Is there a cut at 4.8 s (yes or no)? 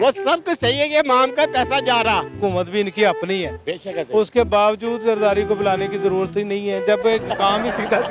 no